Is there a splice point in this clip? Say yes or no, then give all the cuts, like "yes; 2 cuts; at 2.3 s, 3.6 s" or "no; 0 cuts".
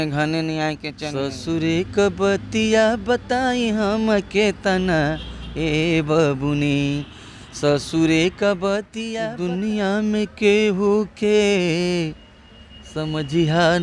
yes; 2 cuts; at 0.9 s, 9.0 s